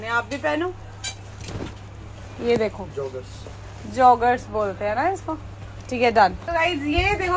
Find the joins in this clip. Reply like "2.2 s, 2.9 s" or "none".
none